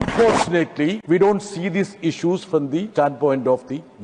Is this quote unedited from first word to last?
no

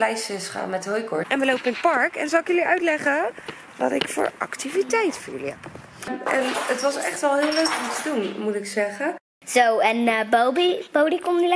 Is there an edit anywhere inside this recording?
yes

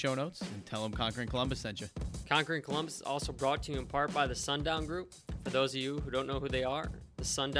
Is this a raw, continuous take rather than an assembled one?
no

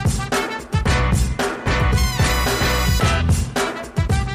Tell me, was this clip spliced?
yes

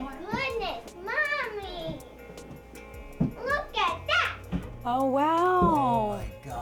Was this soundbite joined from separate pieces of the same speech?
no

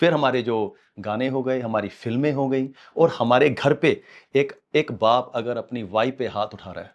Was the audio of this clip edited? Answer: no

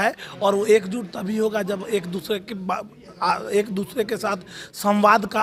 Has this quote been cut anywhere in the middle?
no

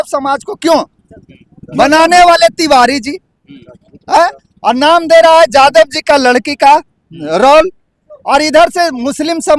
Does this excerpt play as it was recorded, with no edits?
yes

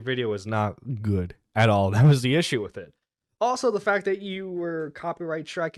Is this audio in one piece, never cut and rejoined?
yes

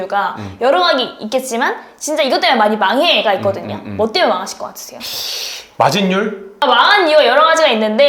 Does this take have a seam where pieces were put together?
yes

